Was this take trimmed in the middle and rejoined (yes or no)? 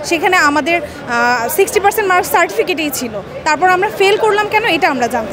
no